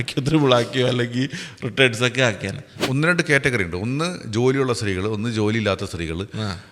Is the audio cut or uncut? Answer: cut